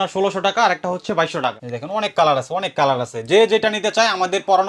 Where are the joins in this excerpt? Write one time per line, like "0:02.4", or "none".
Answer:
0:01.7